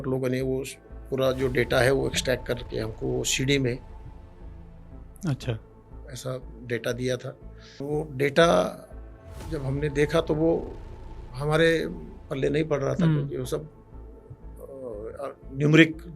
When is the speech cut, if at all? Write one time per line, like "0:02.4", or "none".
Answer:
0:07.8